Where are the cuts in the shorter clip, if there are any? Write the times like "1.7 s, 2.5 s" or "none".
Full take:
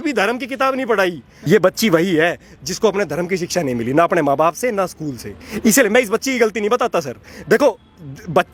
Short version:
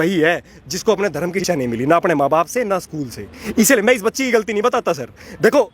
1.4 s